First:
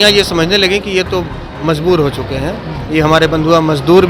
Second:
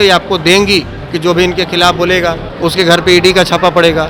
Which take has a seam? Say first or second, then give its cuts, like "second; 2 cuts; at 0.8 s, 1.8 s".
second; 2 cuts; at 1.0 s, 2.5 s